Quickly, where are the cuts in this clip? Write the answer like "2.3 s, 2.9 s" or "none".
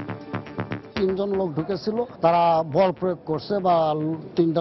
0.9 s, 2.1 s

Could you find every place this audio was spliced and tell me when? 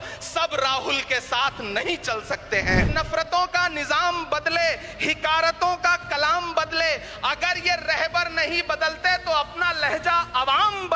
2.9 s

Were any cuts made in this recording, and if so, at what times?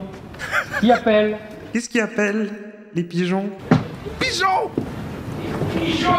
1.5 s, 3.6 s

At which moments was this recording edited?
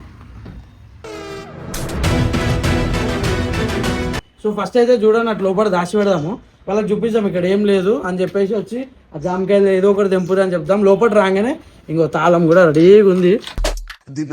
4.2 s

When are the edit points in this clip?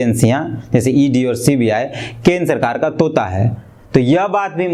none

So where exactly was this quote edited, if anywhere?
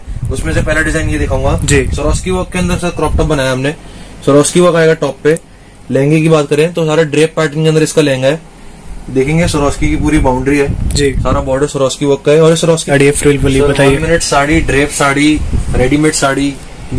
12.8 s

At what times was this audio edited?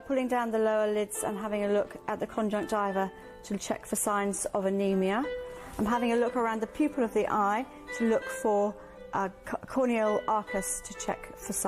none

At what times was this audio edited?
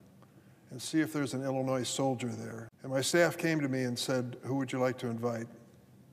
none

